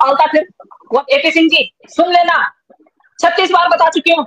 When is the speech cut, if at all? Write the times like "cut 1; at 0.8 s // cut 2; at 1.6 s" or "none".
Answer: cut 1; at 1.0 s